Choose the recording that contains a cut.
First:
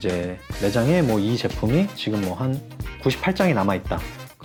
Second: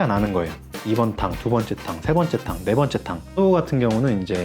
second; 1 cut; at 3.4 s

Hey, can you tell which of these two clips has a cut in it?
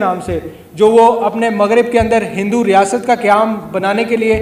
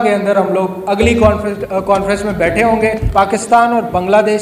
second; 1 cut; at 3.0 s

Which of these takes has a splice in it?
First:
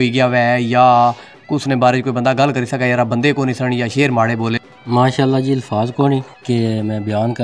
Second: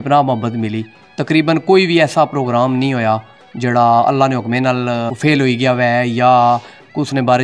first; 2 cuts; at 4.6 s, 6.3 s

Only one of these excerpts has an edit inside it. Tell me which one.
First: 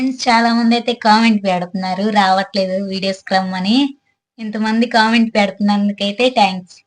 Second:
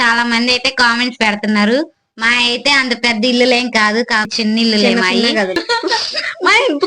second; 2 cuts; at 4.3 s, 5.6 s

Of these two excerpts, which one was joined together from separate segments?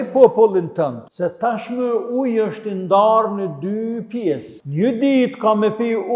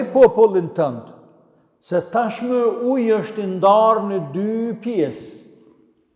first; 2 cuts; at 1.0 s, 4.6 s

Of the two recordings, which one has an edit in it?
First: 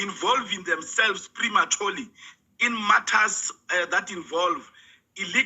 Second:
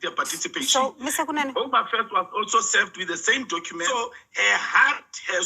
second; 1 cut; at 3.8 s

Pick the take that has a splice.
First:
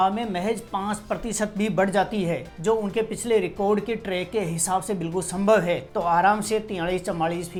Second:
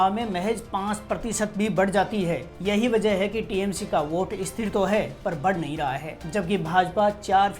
second; 2 cuts; at 2.5 s, 6.1 s

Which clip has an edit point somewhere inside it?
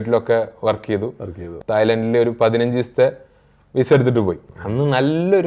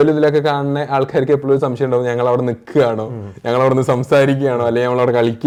first; 2 cuts; at 1.5 s, 4.5 s

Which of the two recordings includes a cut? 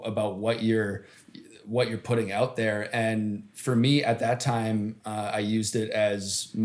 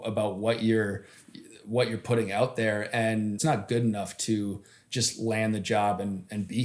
second; 1 cut; at 3.4 s

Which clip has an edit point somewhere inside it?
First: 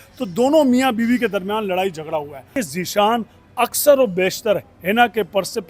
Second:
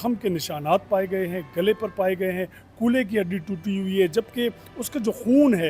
first; 1 cut; at 2.6 s

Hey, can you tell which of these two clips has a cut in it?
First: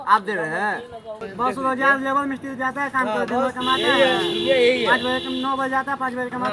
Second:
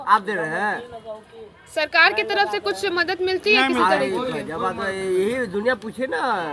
first; 1 cut; at 1.2 s

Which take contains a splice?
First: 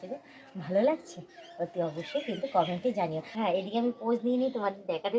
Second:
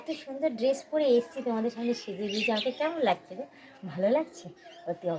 first; 1 cut; at 3.2 s

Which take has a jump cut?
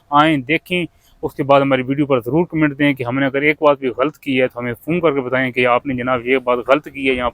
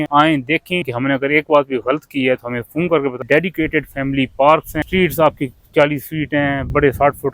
second; 3 cuts; at 0.9 s, 3.2 s, 4.7 s

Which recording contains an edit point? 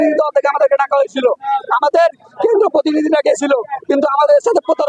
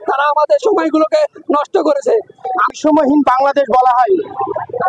second; 1 cut; at 2.8 s

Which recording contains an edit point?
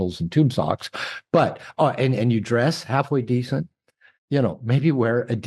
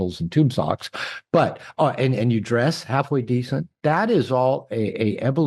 second; 1 cut; at 3.6 s

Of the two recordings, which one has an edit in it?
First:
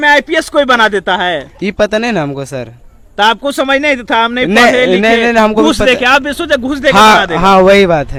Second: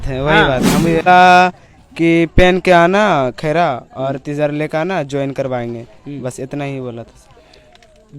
second; 1 cut; at 1.0 s

